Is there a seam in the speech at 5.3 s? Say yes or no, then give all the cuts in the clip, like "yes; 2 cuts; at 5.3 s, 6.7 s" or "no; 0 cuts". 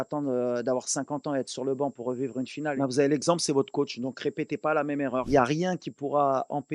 yes; 2 cuts; at 2.7 s, 5.3 s